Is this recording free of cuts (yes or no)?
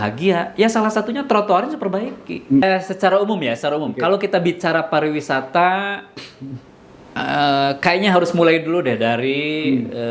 no